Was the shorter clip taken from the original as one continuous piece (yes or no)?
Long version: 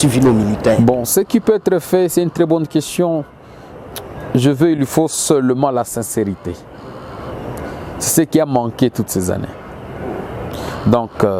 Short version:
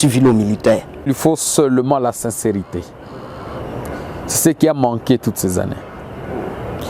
no